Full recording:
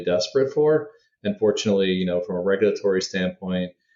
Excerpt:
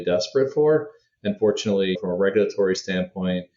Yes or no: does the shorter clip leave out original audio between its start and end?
yes